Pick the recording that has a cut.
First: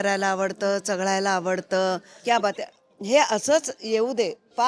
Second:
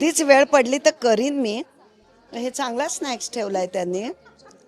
first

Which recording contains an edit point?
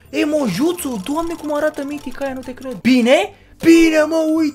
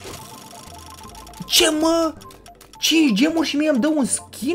first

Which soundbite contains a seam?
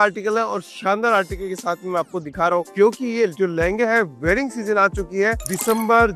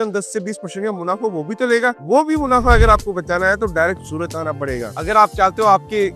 second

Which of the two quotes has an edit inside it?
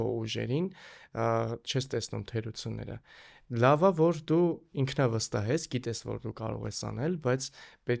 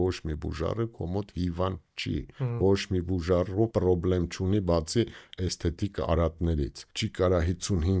second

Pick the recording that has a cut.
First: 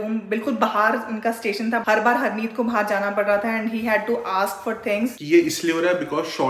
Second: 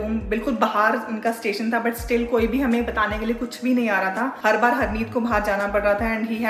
first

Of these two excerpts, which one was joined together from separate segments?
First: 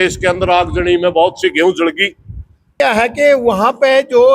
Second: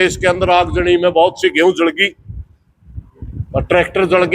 first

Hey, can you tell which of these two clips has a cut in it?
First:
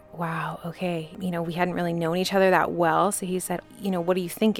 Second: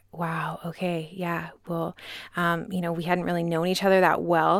first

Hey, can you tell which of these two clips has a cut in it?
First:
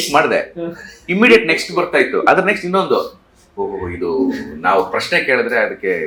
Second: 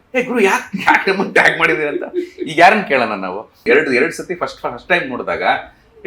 second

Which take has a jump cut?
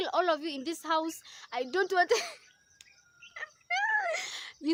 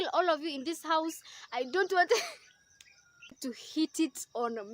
second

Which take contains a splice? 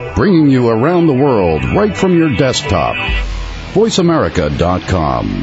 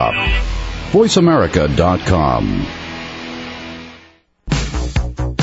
second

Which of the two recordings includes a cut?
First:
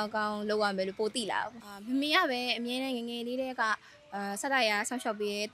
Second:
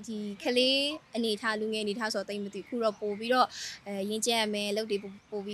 first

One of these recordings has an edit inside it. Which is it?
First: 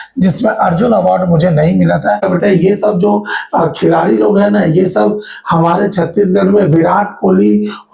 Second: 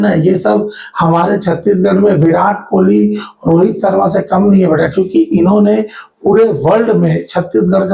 first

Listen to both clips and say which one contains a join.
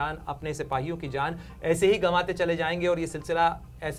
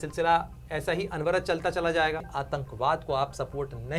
second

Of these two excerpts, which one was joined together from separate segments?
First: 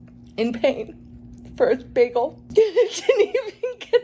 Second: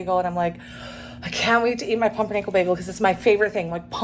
first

